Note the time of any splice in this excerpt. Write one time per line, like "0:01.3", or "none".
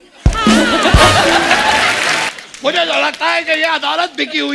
0:02.3